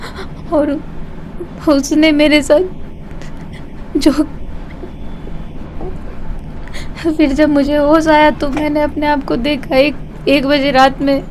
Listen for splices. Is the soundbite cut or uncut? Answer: uncut